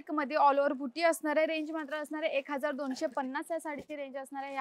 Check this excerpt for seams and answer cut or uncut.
uncut